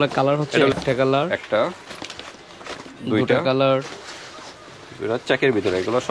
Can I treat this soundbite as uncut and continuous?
yes; 0 cuts

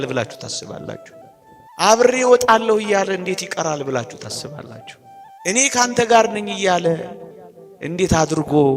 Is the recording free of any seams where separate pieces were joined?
no; 2 cuts; at 1.2 s, 5.2 s

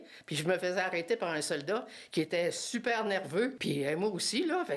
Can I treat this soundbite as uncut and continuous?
no; 1 cut; at 3.6 s

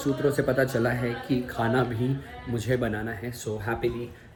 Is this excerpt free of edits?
yes; 0 cuts

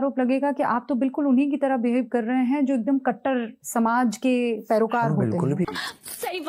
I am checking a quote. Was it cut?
yes; 1 cut; at 5.6 s

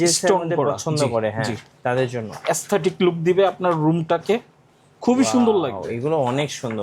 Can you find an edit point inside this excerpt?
no; 0 cuts

